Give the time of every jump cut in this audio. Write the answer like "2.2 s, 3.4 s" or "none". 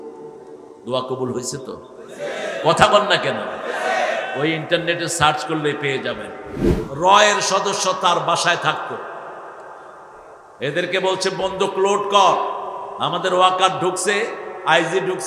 6.8 s